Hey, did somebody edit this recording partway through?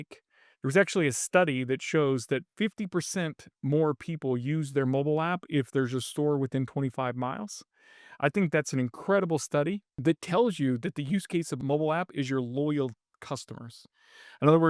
yes; 2 cuts; at 9.9 s, 11.6 s

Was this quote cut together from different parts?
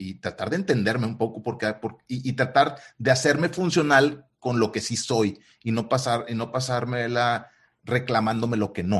no; 0 cuts

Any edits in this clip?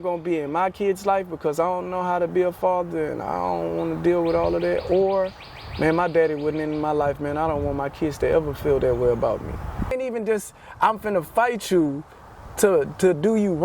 yes; 1 cut; at 9.9 s

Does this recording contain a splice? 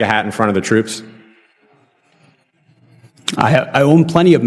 no; 0 cuts

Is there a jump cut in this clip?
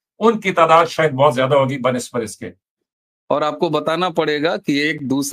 yes; 1 cut; at 2.7 s

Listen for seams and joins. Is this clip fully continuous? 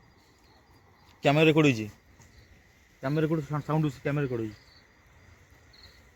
yes; 0 cuts

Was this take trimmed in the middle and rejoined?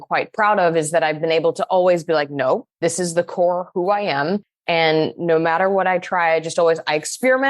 yes; 1 cut; at 2.7 s

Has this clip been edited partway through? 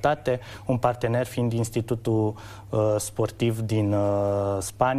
yes; 1 cut; at 3.3 s

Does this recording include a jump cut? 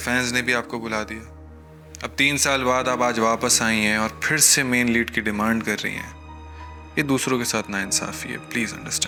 no; 0 cuts

